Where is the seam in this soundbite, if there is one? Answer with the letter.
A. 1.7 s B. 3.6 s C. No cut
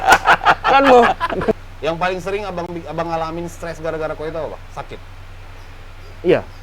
A